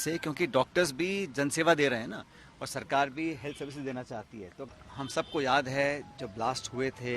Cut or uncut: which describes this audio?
cut